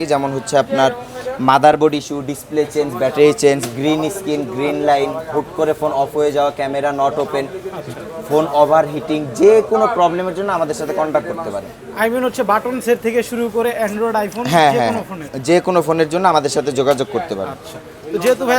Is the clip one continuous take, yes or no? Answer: yes